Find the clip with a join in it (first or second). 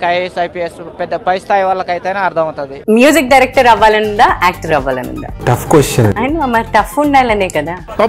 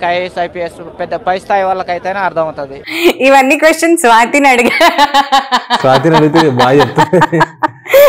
first